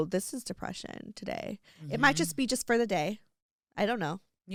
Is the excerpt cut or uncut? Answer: uncut